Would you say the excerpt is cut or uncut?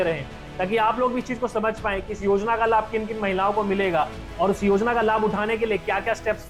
uncut